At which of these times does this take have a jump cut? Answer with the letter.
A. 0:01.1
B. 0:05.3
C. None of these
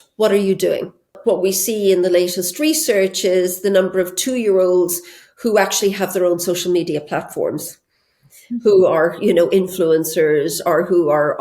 A